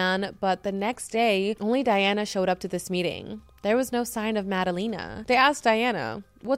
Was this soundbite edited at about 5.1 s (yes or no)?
yes